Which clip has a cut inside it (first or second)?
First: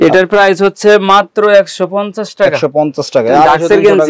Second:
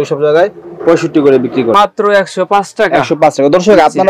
second